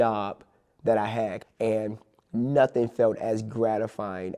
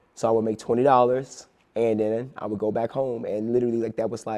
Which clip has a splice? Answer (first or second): first